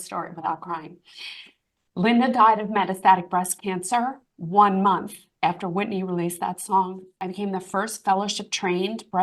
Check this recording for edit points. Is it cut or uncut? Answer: cut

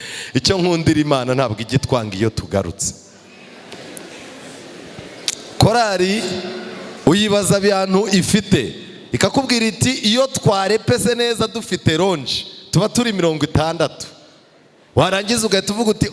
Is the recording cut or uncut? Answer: cut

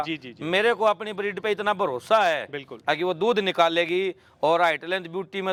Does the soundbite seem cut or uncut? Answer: uncut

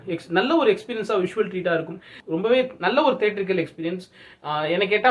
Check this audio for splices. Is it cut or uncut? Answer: cut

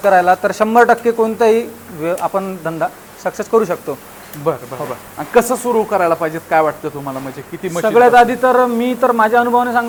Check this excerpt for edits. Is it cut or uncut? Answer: uncut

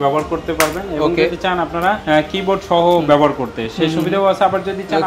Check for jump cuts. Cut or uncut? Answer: uncut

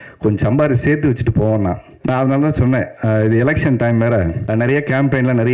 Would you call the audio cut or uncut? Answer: cut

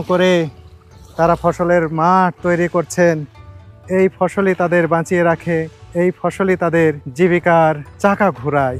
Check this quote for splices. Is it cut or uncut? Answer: cut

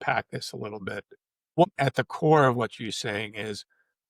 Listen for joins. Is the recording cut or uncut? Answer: cut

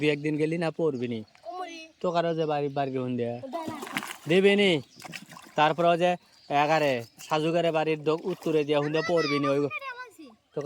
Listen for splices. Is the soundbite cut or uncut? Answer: uncut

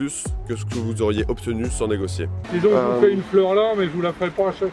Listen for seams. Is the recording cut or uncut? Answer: uncut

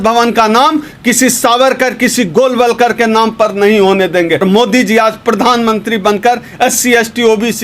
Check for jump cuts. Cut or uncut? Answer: cut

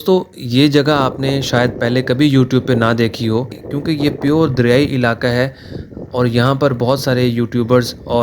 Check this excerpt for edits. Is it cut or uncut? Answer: uncut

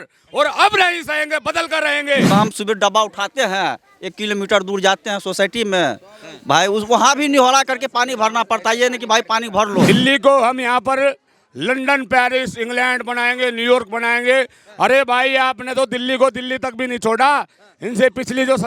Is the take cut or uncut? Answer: cut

